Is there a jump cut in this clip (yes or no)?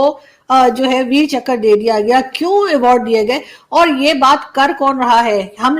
no